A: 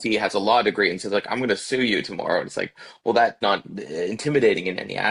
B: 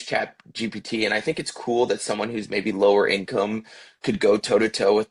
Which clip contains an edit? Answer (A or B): A